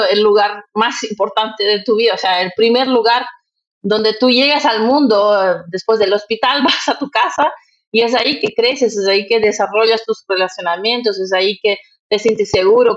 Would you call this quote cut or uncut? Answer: uncut